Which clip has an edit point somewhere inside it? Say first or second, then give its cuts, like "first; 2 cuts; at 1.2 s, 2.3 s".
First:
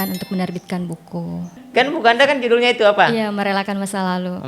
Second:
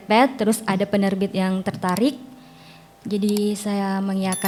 first; 1 cut; at 1.6 s